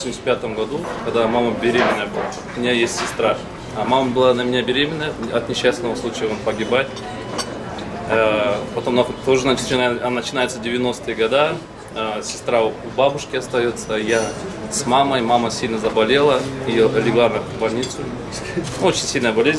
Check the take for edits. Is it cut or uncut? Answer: uncut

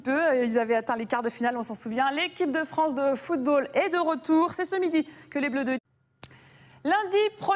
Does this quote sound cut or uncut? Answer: uncut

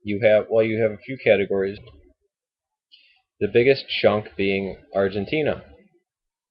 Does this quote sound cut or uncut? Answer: uncut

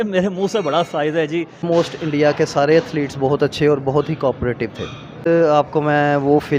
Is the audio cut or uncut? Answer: cut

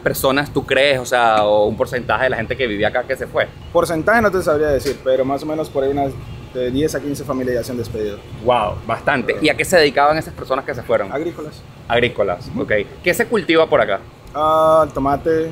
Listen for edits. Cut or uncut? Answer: uncut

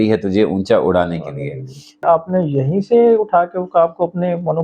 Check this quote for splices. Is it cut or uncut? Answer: cut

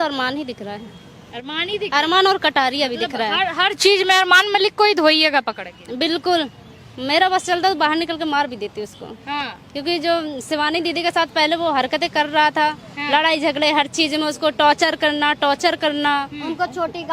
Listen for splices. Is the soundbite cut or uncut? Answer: uncut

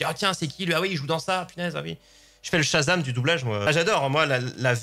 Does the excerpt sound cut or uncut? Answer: cut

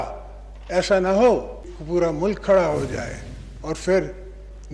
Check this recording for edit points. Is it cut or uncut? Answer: cut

